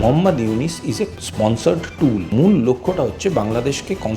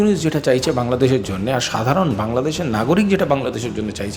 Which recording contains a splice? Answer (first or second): first